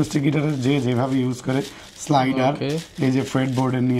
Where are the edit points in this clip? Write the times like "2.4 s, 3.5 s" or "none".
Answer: none